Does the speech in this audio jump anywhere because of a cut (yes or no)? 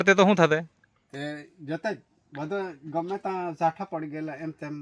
no